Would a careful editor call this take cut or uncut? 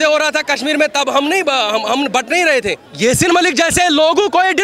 cut